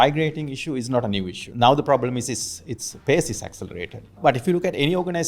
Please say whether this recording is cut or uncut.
cut